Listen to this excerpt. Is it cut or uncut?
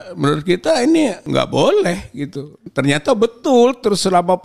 cut